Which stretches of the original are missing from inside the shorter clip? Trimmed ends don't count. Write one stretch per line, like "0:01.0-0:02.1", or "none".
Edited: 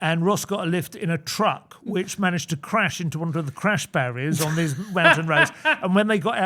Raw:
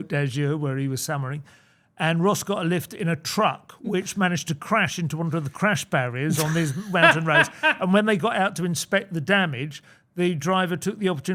none